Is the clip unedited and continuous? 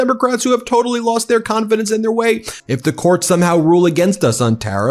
no; 1 cut; at 2.5 s

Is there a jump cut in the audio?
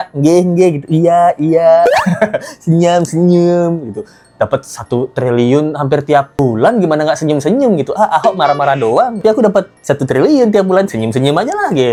no; 0 cuts

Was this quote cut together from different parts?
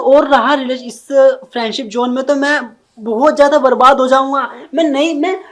no; 0 cuts

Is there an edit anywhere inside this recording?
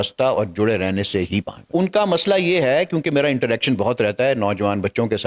yes; 1 cut; at 1.7 s

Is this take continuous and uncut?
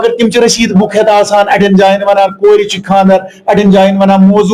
yes; 0 cuts

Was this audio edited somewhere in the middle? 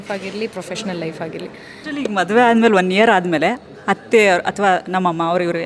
yes; 1 cut; at 1.8 s

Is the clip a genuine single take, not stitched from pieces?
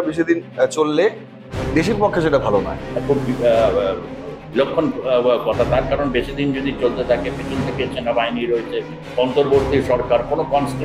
yes; 0 cuts

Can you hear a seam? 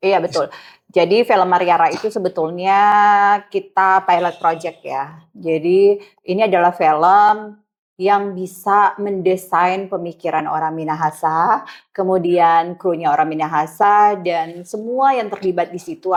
no; 0 cuts

